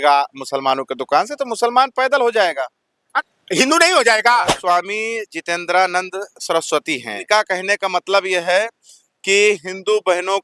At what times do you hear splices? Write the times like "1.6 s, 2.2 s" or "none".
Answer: 3.1 s, 4.6 s, 7.2 s